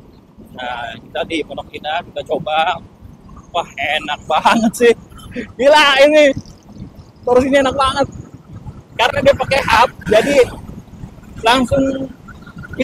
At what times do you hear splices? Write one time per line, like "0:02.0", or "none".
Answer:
none